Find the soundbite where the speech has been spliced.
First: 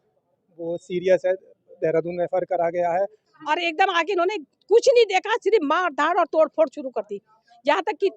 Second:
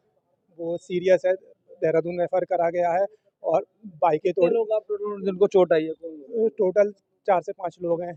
first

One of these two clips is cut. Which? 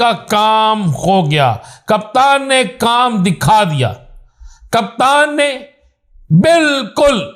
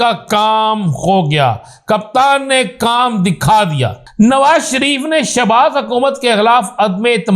second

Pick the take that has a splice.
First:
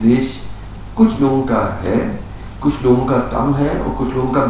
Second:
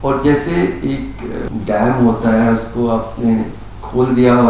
second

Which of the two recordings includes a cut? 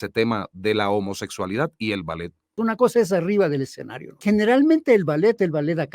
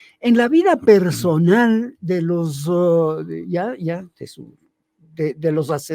first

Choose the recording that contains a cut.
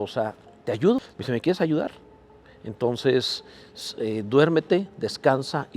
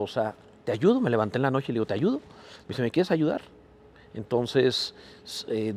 first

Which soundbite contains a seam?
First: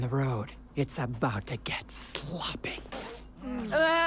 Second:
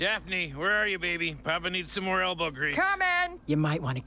first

